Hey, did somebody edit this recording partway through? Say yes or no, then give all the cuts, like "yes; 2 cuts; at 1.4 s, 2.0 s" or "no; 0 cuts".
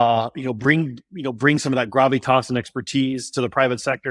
no; 0 cuts